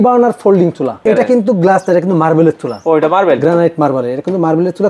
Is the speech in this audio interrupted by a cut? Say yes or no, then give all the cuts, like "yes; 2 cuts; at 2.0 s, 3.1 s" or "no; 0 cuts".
yes; 1 cut; at 1.0 s